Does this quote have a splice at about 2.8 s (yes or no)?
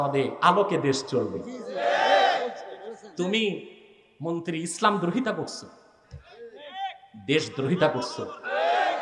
no